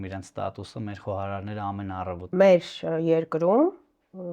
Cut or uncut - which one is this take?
cut